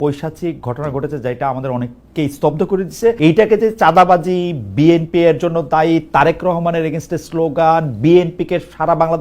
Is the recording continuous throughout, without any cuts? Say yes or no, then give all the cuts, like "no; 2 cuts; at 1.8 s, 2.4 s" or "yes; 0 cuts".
no; 1 cut; at 3.2 s